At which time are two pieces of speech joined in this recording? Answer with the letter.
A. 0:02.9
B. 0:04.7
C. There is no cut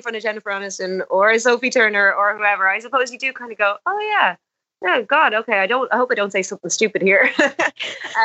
C